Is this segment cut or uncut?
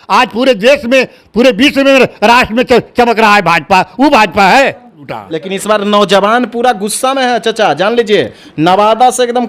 cut